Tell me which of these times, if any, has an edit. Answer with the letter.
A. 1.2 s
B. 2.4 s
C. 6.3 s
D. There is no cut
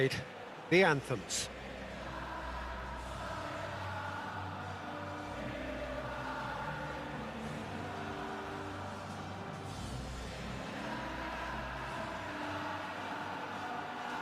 A